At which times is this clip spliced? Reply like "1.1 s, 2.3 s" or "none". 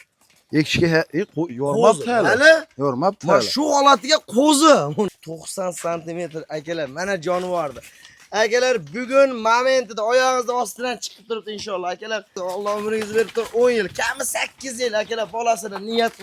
5.1 s, 12.4 s